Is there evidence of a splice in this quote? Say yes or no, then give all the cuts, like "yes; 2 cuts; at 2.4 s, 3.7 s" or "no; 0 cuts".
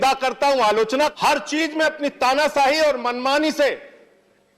yes; 1 cut; at 1.1 s